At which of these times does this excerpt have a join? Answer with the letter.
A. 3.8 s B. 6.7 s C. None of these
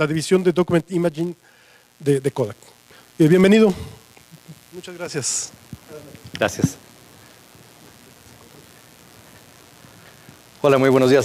B